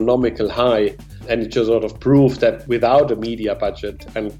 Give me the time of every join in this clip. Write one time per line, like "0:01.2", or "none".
0:01.2
0:02.6

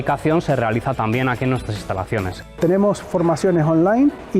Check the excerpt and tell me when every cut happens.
0:02.4

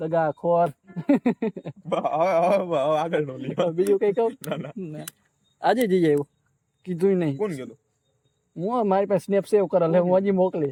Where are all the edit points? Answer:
none

